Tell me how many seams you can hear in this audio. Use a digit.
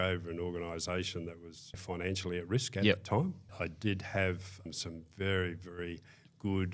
3